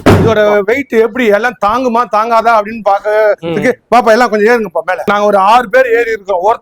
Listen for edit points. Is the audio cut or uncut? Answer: cut